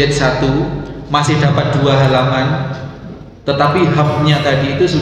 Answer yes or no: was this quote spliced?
no